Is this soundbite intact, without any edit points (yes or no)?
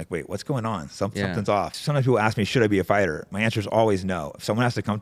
no